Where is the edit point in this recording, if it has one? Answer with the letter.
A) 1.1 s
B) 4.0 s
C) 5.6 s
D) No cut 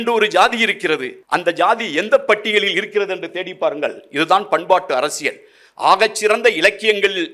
A